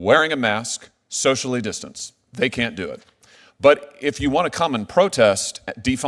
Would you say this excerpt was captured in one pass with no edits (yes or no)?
yes